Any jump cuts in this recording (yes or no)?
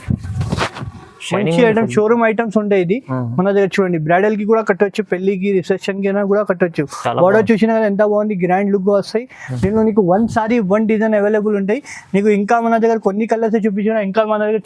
no